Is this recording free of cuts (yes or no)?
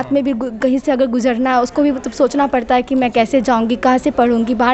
yes